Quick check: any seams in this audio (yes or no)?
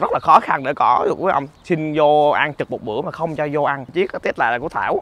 yes